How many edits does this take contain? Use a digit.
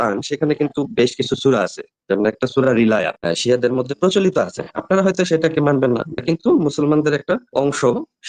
1